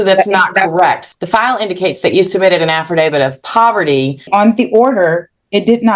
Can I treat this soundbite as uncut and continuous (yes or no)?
no